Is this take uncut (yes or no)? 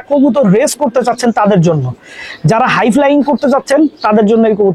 yes